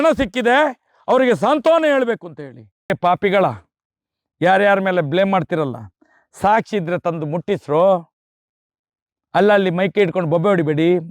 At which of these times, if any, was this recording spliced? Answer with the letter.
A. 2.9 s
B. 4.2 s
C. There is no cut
A